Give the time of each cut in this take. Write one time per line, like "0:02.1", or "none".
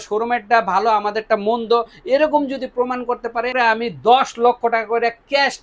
0:03.5